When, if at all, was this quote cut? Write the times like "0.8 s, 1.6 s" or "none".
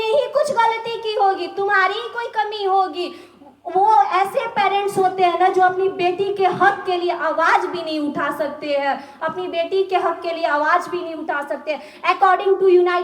none